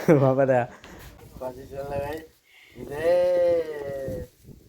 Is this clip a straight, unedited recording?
no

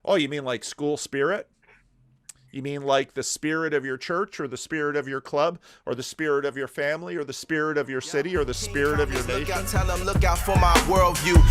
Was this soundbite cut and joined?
yes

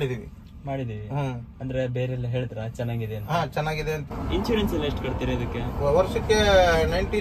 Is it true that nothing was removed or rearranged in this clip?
no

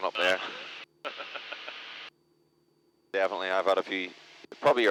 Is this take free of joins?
yes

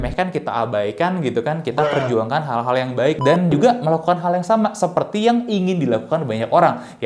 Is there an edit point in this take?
yes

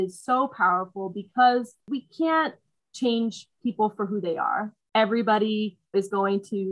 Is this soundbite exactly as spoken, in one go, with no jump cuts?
no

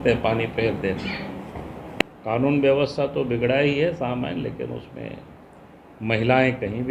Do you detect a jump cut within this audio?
yes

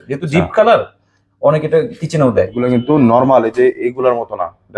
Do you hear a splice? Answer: yes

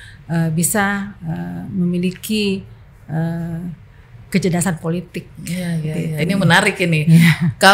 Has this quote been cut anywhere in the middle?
no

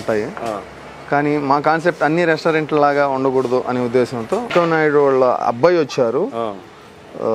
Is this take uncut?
no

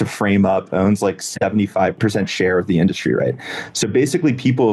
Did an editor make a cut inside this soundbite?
yes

